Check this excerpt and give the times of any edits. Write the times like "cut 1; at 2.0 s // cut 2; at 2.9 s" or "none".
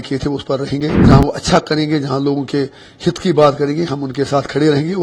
cut 1; at 1.0 s